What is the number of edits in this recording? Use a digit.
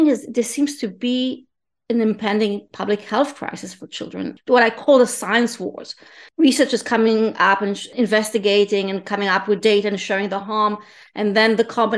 3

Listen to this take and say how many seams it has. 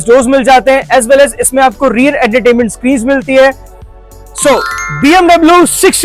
1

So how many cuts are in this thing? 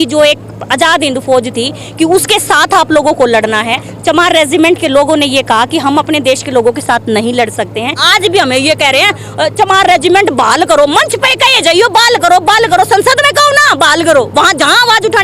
1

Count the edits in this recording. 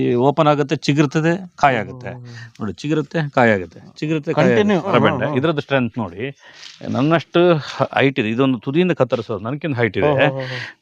1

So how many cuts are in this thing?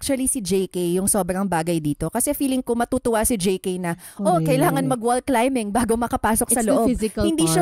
0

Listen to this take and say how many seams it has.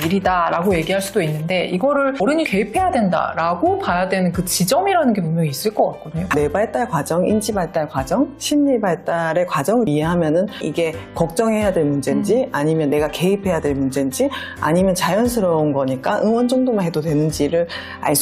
2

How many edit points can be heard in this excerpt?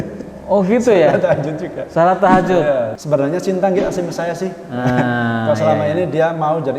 1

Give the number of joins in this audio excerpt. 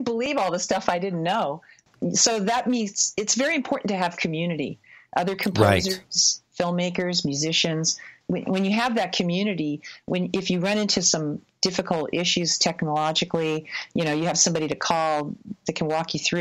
2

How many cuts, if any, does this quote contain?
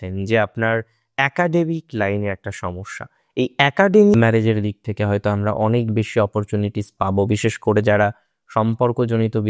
1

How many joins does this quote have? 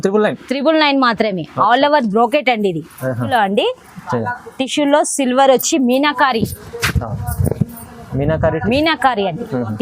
1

